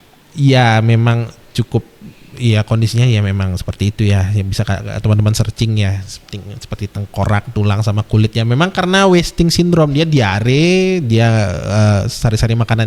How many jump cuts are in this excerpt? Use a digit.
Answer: 0